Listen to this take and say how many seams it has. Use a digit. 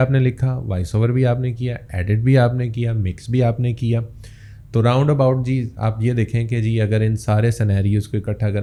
0